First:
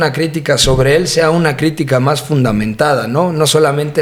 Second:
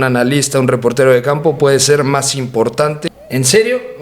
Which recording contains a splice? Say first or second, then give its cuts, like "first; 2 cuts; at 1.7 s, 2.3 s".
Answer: second; 1 cut; at 3.0 s